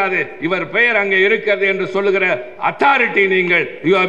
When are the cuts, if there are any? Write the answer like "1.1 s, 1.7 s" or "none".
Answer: none

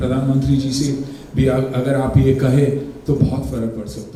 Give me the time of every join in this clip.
none

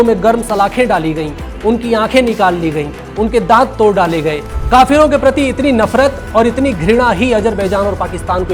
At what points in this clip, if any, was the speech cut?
4.5 s

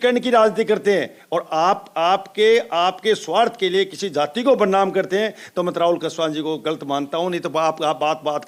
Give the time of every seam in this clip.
none

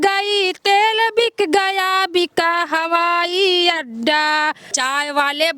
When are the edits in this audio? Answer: 4.7 s

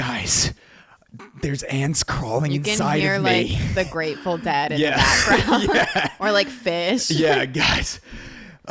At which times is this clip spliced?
none

